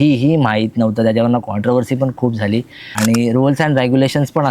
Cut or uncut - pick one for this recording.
cut